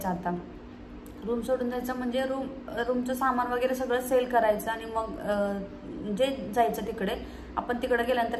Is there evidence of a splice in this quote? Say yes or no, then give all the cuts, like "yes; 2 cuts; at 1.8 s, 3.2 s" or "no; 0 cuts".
no; 0 cuts